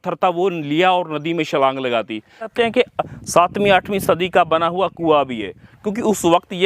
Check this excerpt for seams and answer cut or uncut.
cut